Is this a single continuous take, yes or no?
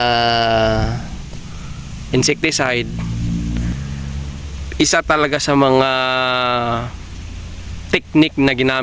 no